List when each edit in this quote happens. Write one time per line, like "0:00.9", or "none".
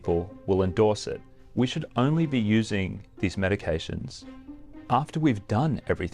0:01.4